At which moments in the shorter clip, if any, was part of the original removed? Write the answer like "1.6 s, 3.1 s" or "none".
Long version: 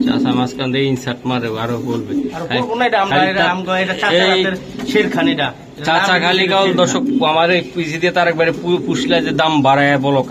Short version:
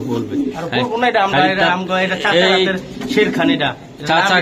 none